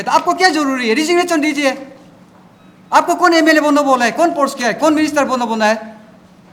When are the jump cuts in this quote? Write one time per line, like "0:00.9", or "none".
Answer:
none